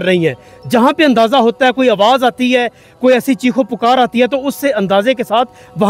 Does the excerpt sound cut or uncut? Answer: uncut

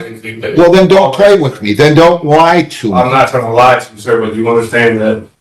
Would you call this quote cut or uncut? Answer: uncut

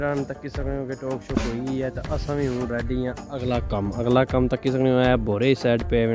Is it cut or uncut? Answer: uncut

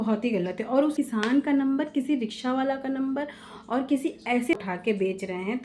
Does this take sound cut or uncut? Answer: cut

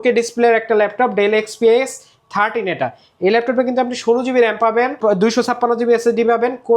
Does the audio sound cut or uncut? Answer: cut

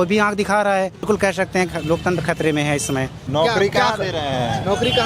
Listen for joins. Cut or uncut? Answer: cut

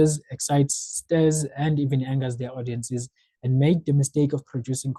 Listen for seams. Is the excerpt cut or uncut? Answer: uncut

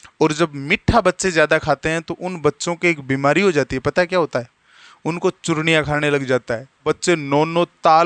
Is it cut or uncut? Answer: cut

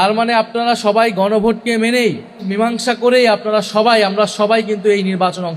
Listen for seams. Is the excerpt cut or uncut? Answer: cut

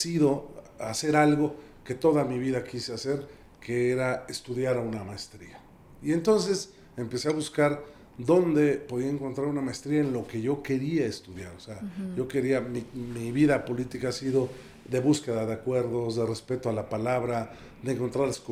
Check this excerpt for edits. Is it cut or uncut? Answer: uncut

